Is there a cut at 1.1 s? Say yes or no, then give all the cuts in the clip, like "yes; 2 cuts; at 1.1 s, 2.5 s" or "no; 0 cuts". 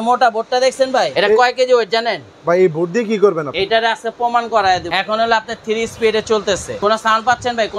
yes; 4 cuts; at 1.1 s, 3.5 s, 4.9 s, 6.8 s